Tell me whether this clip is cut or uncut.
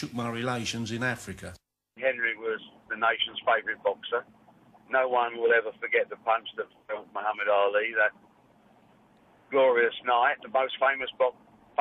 cut